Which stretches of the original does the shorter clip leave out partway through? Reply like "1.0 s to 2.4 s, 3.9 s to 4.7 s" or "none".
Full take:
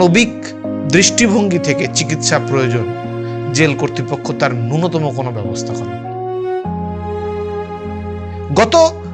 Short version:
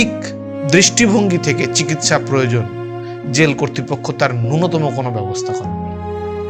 5.3 s to 6.1 s